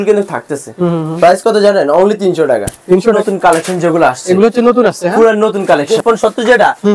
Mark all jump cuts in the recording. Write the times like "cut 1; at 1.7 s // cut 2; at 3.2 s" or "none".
cut 1; at 3.2 s // cut 2; at 5.9 s